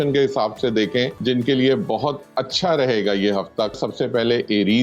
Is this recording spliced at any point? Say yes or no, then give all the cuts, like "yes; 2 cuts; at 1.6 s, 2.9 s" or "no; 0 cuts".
yes; 2 cuts; at 1.1 s, 3.7 s